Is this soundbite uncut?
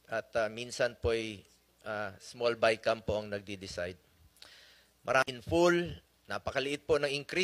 no; 1 cut; at 5.3 s

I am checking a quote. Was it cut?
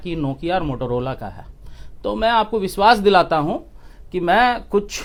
no; 0 cuts

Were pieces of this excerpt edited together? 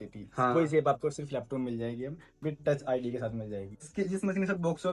yes; 1 cut; at 3.6 s

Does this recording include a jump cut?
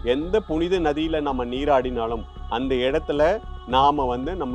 no; 0 cuts

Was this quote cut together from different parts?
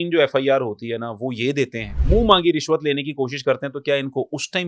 yes; 1 cut; at 1.9 s

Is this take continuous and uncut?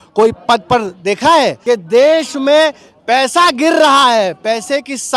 no; 1 cut; at 1.6 s

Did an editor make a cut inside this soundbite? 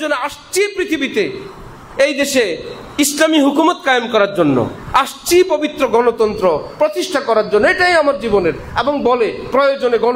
no; 0 cuts

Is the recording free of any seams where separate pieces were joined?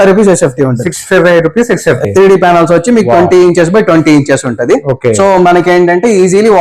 no; 1 cut; at 2.0 s

